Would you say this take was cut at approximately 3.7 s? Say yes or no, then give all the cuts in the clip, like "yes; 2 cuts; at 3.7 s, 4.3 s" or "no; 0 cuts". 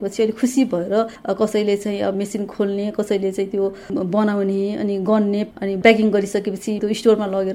no; 4 cuts; at 1.2 s, 2.1 s, 5.5 s, 6.8 s